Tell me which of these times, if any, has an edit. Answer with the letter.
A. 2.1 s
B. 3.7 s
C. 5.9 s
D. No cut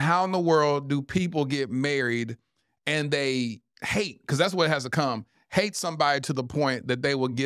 B